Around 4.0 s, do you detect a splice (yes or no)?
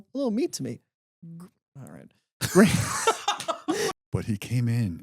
yes